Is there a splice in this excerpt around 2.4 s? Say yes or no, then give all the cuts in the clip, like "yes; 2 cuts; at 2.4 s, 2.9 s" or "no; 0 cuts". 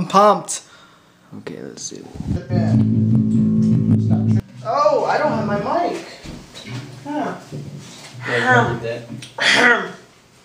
yes; 2 cuts; at 2.4 s, 4.4 s